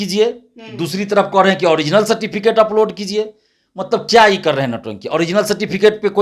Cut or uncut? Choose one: uncut